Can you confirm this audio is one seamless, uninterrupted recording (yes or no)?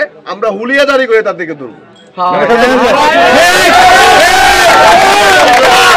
yes